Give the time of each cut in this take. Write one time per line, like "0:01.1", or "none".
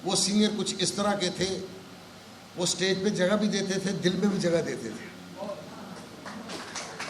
none